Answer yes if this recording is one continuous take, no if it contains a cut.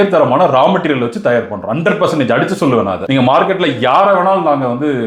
yes